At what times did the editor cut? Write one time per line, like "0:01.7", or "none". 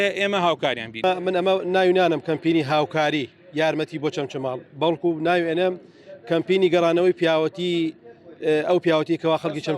0:01.0